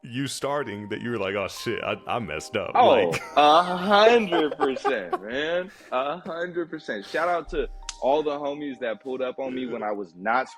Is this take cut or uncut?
uncut